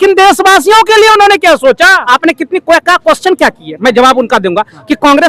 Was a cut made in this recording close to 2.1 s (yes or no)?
yes